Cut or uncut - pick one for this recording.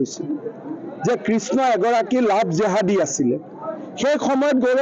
uncut